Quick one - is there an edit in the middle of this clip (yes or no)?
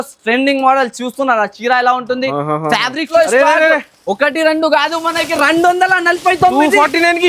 yes